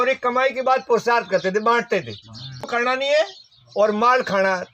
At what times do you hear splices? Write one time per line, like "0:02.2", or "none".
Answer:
0:02.7